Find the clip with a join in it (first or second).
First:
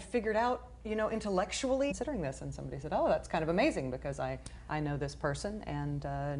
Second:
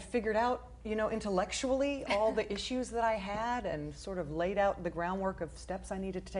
second